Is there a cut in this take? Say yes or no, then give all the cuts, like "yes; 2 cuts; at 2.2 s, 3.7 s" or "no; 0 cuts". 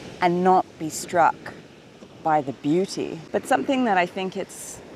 yes; 1 cut; at 3.2 s